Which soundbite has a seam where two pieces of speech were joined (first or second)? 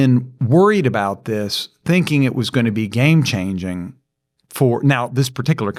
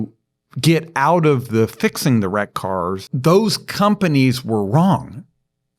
second